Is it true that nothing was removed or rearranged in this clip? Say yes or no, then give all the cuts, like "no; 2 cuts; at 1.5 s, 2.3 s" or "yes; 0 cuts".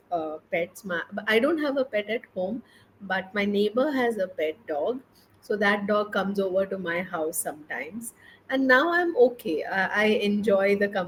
yes; 0 cuts